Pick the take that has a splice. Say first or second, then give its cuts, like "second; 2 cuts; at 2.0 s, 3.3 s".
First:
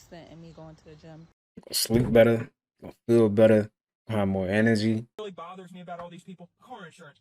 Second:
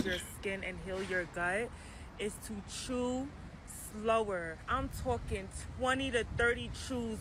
first; 1 cut; at 5.2 s